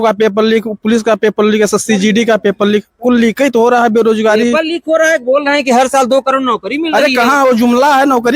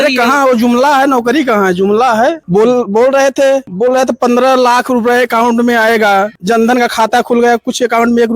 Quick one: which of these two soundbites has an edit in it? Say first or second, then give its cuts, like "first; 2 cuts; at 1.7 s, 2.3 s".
second; 3 cuts; at 2.4 s, 3.7 s, 6.4 s